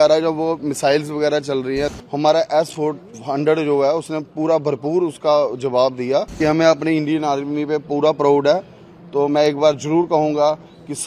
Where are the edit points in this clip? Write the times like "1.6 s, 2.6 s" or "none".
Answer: 1.9 s, 6.4 s